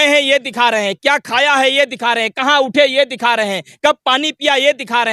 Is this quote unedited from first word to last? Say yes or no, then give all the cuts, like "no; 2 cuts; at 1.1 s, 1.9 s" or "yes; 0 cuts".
yes; 0 cuts